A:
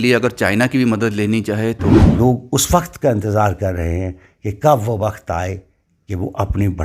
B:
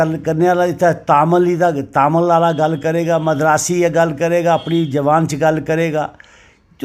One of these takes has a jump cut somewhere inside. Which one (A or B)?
A